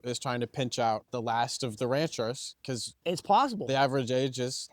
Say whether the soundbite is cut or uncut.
cut